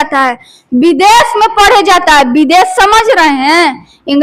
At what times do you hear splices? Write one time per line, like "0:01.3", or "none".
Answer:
none